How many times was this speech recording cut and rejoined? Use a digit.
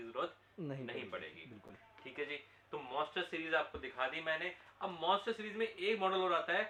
0